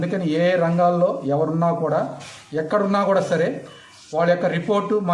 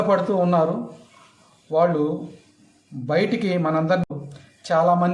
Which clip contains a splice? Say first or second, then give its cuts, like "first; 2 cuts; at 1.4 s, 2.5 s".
second; 1 cut; at 4.0 s